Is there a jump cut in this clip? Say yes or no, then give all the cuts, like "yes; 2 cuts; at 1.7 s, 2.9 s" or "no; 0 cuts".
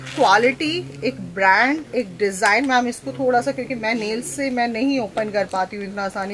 no; 0 cuts